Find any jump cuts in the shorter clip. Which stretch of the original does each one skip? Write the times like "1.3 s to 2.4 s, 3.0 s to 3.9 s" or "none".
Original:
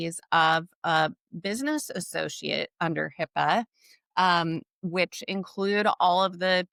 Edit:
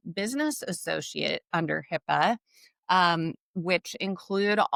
none